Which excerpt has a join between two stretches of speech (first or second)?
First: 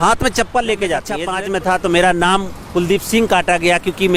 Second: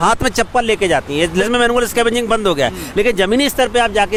first